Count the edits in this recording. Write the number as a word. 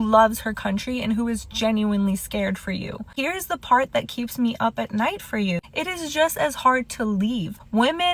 one